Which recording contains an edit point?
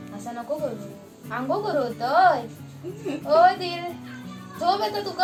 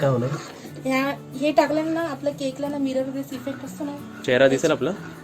second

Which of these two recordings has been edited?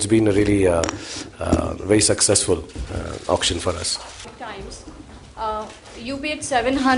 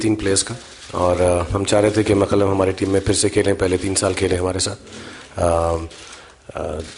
first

